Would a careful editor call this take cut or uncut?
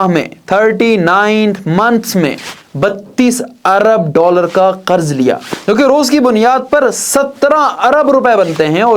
uncut